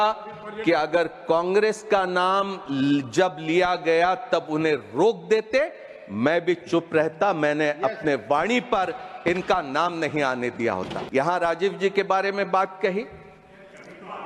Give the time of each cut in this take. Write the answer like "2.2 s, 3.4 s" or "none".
11.0 s